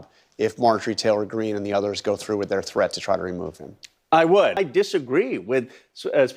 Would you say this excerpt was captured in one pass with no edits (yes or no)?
no